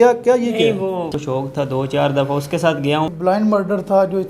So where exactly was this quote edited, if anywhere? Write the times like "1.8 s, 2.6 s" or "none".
1.1 s, 3.1 s